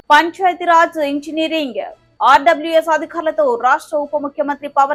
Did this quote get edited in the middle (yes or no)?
no